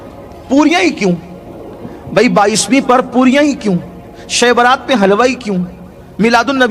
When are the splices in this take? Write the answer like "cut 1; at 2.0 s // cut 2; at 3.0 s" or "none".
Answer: none

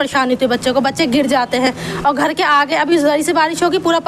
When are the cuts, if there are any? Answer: none

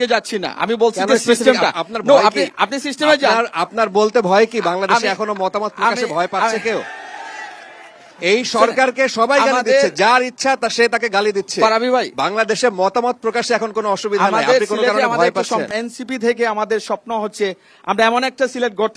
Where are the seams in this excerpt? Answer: cut 1; at 15.8 s

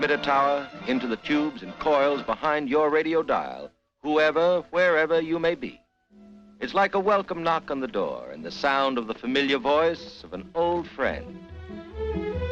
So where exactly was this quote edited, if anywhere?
cut 1; at 3.9 s

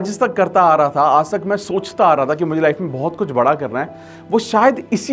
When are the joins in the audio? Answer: none

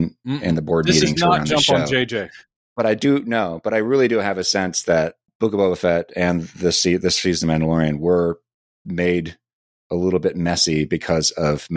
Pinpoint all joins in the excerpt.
cut 1; at 5.3 s

